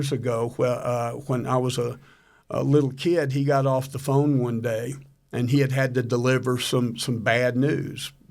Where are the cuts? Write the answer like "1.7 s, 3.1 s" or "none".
none